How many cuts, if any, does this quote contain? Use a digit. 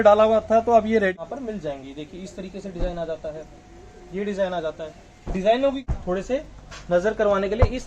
2